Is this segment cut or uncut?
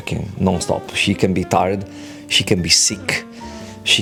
uncut